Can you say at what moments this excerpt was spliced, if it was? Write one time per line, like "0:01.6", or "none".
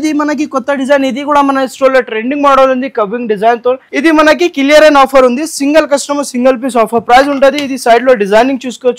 0:03.9